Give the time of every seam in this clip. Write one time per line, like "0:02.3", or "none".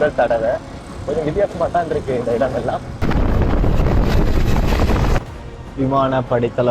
0:00.9
0:03.0